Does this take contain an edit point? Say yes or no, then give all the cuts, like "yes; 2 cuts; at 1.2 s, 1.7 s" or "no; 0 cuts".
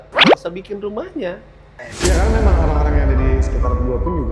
yes; 1 cut; at 1.5 s